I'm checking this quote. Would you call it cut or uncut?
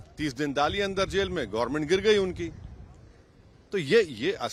uncut